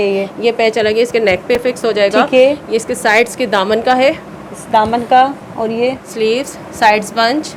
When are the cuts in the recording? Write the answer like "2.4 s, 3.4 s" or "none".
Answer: none